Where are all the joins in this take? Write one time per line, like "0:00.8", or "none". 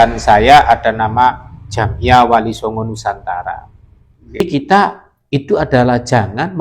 0:04.4